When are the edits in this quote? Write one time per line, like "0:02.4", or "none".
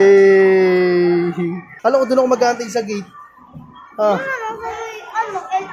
0:01.6